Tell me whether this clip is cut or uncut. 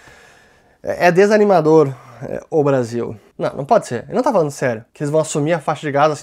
cut